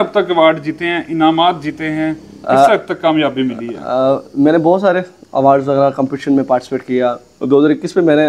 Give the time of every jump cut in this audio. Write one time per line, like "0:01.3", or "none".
none